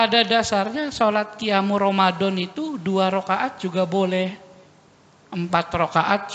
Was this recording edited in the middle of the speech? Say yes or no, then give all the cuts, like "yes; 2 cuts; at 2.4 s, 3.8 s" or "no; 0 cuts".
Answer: no; 0 cuts